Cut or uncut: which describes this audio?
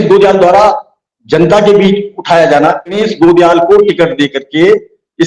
cut